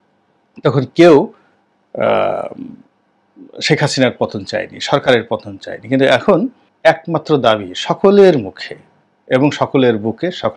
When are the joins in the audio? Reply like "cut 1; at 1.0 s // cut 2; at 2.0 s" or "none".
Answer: none